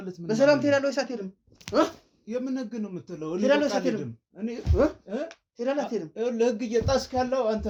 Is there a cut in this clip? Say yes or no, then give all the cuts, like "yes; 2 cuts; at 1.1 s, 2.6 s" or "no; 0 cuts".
no; 0 cuts